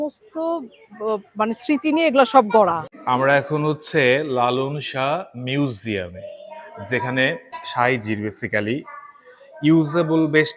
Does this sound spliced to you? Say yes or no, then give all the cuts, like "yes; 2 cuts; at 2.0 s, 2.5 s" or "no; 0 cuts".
yes; 1 cut; at 2.9 s